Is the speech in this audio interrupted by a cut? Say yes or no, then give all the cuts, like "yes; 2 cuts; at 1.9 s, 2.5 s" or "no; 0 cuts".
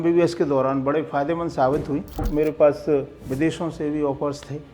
yes; 2 cuts; at 2.2 s, 3.2 s